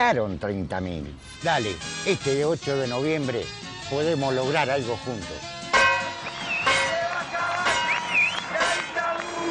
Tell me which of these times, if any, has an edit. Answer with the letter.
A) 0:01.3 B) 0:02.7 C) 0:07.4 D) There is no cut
A